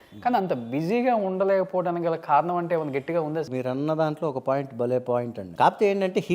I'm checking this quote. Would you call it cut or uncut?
cut